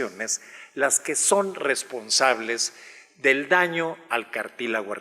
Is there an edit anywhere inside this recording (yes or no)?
yes